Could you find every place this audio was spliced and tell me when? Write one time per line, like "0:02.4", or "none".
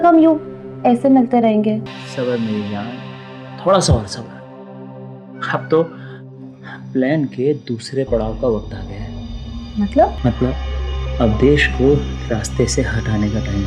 0:02.0
0:10.2

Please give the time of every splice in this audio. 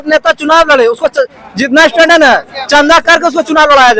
none

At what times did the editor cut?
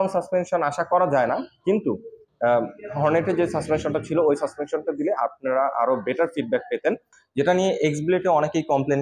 0:07.2

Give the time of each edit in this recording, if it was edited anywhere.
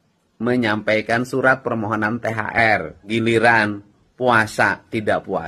0:03.0

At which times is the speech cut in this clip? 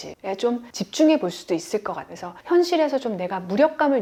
none

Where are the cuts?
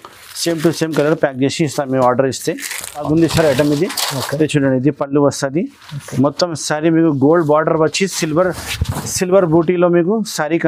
0:03.0

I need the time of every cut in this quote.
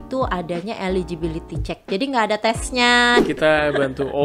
0:03.2

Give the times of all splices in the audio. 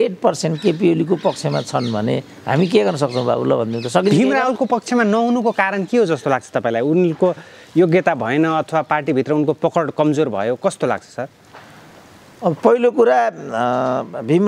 none

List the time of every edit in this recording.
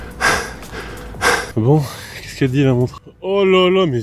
0:01.5

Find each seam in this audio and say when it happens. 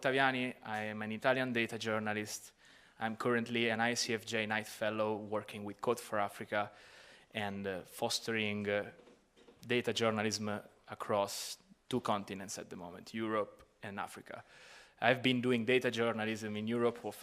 0:05.6

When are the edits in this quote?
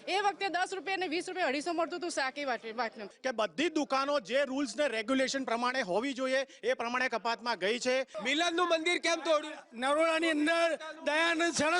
0:03.1
0:08.1

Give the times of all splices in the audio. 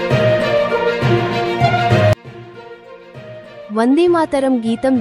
0:01.3
0:02.2

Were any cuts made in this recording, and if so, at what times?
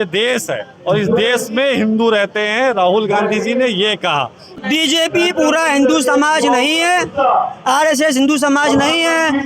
0:04.6

